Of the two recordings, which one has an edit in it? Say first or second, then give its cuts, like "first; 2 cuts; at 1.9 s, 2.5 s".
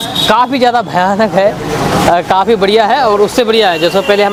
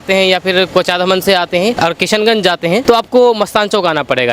second; 2 cuts; at 1.8 s, 2.8 s